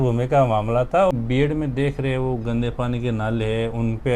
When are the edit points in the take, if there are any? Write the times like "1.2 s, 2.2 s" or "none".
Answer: 1.1 s